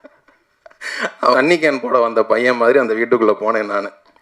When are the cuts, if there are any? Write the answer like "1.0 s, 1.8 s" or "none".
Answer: 1.3 s